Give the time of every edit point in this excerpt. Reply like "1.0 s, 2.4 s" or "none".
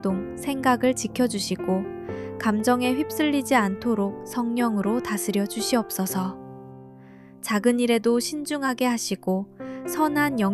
none